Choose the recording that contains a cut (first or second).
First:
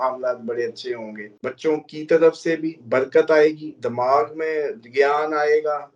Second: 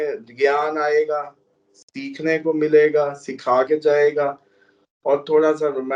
first